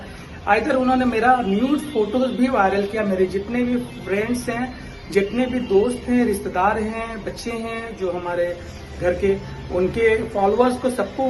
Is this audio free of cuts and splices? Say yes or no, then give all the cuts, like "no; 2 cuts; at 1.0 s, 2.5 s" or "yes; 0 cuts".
yes; 0 cuts